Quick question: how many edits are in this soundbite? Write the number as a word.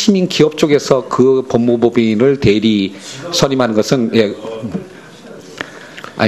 zero